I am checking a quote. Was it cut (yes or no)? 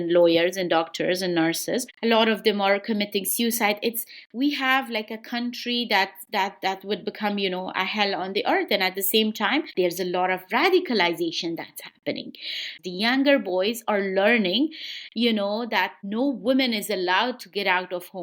yes